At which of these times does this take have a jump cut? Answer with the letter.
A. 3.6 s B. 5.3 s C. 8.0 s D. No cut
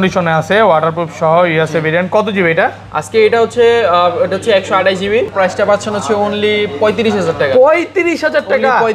B